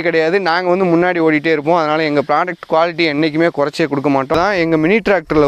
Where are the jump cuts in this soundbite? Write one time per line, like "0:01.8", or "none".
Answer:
0:04.3